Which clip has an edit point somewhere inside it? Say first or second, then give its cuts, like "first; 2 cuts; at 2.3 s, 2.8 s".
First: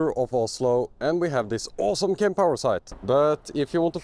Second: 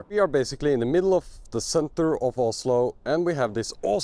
first; 1 cut; at 2.9 s